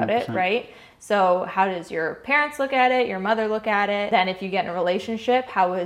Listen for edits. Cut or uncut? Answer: cut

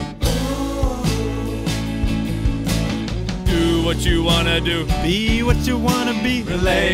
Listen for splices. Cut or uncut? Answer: uncut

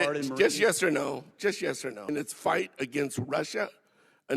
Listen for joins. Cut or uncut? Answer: cut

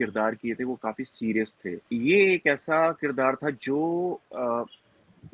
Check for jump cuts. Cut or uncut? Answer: cut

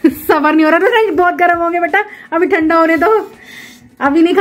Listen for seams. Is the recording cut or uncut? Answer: uncut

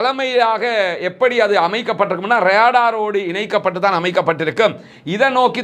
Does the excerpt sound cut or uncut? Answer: uncut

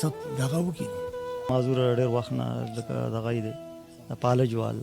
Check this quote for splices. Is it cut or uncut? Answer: cut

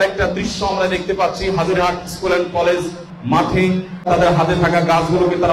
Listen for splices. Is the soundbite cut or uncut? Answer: cut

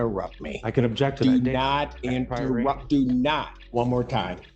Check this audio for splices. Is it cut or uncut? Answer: cut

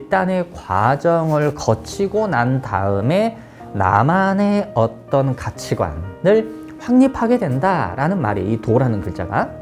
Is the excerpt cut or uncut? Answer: uncut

